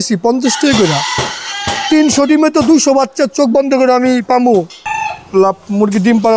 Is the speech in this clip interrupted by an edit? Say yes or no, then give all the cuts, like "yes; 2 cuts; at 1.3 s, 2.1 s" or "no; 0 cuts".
yes; 1 cut; at 4.9 s